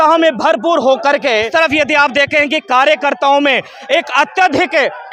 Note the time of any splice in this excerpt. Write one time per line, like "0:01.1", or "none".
0:01.5